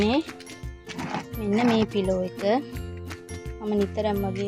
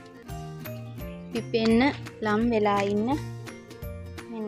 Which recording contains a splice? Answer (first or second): second